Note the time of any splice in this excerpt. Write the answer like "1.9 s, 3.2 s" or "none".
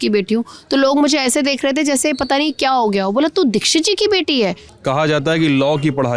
4.7 s